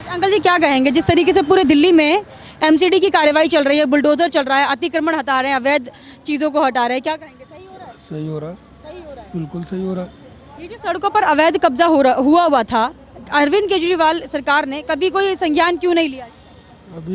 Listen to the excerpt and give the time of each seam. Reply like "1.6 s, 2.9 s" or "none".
none